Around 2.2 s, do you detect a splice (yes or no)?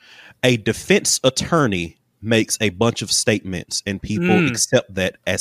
no